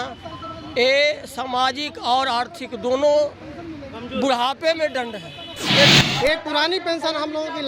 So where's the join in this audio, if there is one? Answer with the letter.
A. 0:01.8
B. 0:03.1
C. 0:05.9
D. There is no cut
C